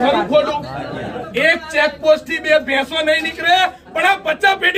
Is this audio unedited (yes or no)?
yes